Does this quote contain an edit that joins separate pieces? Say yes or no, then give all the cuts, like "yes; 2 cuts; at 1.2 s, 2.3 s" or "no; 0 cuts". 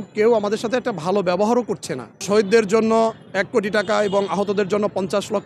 yes; 1 cut; at 2.2 s